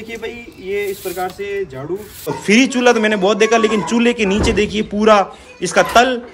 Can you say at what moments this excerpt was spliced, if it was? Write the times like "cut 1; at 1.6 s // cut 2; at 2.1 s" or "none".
cut 1; at 2.3 s